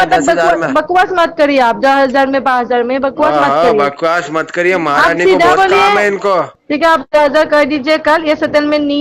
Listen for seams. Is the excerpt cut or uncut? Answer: cut